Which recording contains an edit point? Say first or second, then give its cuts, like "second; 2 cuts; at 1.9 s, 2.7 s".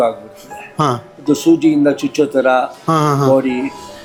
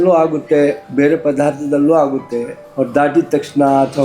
second; 2 cuts; at 0.8 s, 2.6 s